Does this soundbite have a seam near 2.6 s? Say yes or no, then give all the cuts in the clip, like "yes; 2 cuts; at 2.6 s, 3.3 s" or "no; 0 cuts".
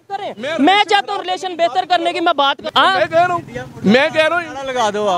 yes; 1 cut; at 2.6 s